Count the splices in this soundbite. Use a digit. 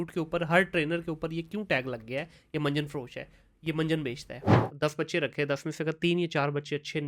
1